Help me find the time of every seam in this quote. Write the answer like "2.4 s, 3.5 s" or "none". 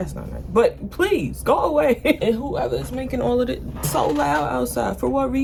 none